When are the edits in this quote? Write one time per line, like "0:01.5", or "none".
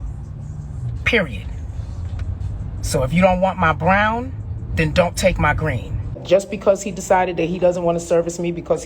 0:06.2